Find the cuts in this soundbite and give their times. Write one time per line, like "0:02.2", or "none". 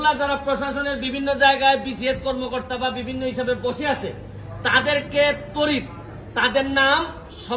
none